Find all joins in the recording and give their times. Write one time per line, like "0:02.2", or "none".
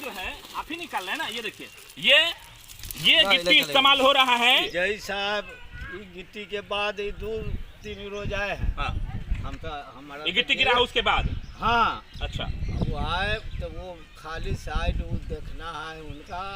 0:04.7